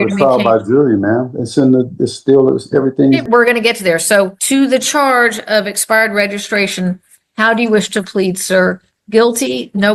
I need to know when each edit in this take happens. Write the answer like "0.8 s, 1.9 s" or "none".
3.2 s, 4.4 s